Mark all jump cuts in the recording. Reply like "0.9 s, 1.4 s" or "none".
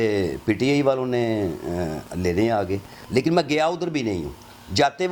none